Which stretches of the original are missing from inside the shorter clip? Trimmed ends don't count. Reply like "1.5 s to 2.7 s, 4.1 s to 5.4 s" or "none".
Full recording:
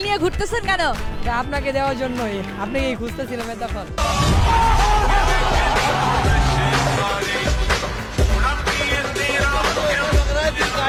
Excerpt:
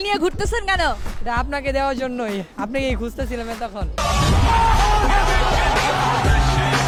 none